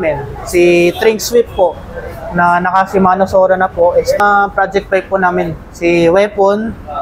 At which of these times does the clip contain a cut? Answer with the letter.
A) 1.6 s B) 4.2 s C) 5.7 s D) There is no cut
B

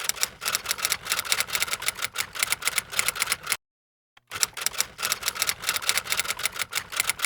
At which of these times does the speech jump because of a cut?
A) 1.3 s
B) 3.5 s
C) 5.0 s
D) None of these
B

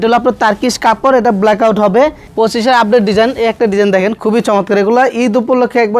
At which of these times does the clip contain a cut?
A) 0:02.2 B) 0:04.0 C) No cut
A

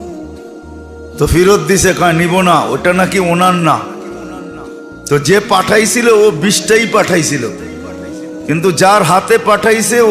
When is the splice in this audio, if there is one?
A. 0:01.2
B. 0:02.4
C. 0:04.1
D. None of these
A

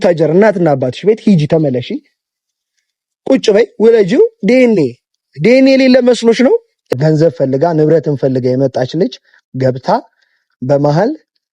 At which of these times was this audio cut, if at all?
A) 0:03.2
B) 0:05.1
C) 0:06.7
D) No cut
C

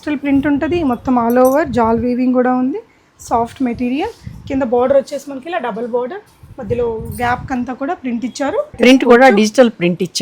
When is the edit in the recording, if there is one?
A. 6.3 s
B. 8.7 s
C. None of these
B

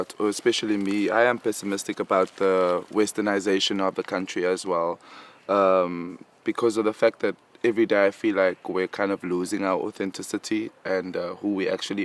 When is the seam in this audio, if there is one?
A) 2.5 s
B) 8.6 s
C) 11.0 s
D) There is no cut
C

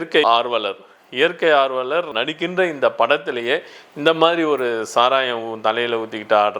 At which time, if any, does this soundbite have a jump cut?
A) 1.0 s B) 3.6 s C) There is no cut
C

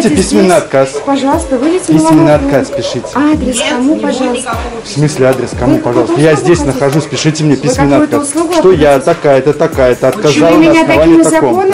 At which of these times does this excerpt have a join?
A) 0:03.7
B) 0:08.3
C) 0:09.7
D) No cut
D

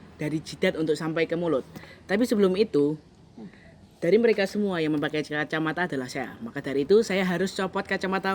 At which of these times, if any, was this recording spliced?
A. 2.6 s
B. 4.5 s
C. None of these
C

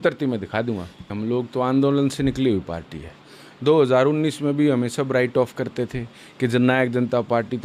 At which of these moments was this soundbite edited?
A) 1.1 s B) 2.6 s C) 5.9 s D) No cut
A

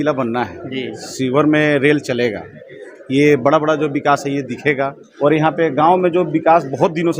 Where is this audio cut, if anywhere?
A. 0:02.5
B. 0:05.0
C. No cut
B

